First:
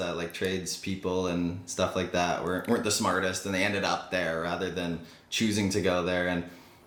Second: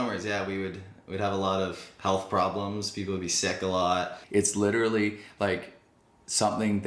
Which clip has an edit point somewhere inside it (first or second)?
second